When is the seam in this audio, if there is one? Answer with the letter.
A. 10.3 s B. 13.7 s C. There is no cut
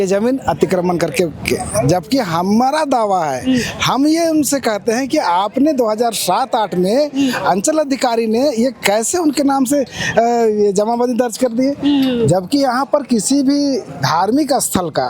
C